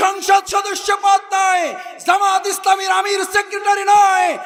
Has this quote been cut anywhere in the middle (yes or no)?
no